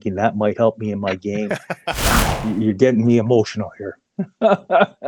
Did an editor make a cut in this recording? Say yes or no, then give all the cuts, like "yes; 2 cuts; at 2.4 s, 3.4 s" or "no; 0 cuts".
yes; 1 cut; at 2.2 s